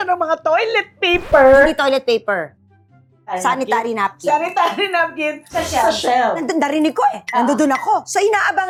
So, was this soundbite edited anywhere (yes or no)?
no